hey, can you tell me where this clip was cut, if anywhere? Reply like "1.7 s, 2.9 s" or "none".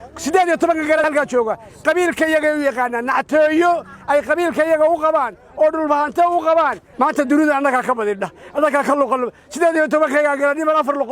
1.0 s, 6.8 s